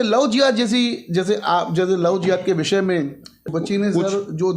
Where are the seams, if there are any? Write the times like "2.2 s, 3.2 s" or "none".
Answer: 3.5 s